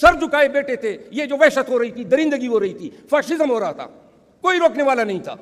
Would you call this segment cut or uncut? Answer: uncut